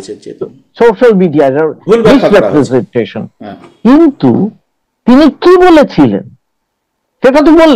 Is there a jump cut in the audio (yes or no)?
no